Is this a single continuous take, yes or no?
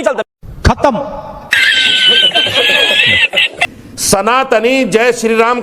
no